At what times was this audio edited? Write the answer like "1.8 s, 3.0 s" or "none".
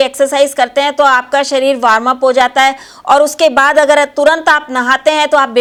none